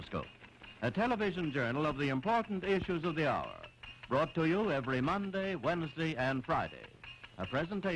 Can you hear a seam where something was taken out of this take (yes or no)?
no